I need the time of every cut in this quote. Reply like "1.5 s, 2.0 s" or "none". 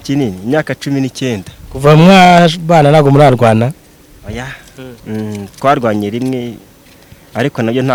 none